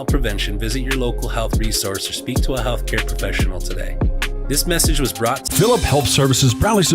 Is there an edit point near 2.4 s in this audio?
no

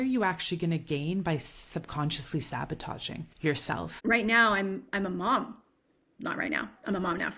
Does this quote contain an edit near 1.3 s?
no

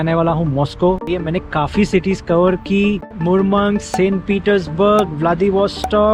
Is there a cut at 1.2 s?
yes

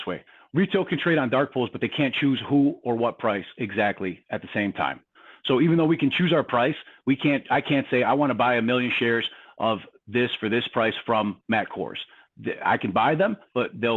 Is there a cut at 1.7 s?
no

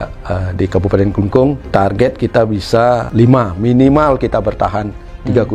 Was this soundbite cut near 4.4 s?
no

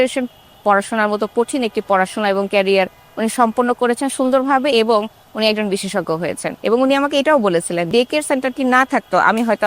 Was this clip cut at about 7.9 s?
yes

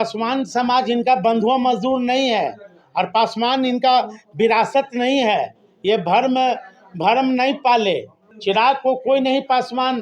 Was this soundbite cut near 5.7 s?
no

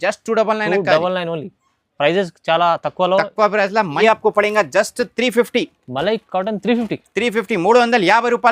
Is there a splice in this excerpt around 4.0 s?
yes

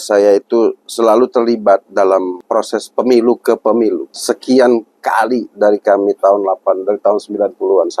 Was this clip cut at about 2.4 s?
yes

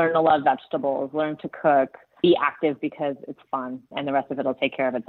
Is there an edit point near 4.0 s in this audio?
yes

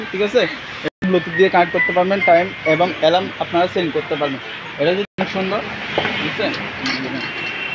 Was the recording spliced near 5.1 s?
yes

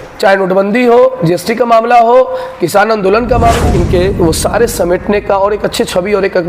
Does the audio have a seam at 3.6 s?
yes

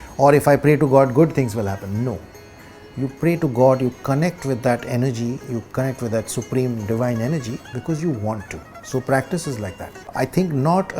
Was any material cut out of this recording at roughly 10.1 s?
yes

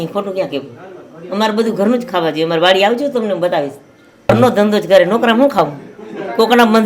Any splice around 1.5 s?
no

